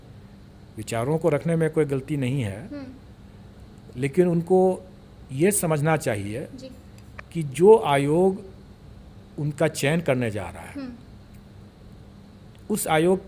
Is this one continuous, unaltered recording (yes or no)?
yes